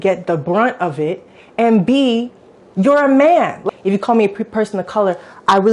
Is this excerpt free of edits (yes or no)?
no